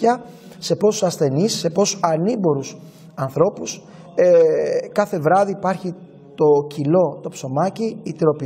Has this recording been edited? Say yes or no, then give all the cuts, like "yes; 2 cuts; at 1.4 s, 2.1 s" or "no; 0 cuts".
no; 0 cuts